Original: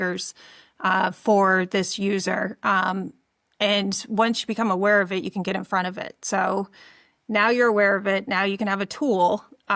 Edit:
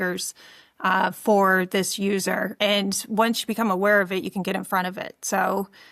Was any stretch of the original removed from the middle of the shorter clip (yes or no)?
yes